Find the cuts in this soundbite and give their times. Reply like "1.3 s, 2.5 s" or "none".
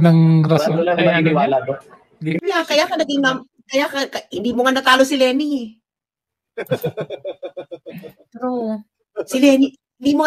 2.4 s